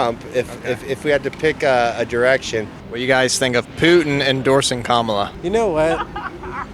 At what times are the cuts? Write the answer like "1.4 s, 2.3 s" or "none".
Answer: 2.6 s